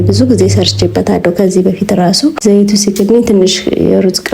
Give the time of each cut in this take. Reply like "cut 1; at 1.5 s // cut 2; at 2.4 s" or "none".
cut 1; at 2.4 s